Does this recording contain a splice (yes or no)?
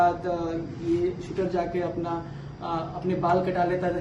no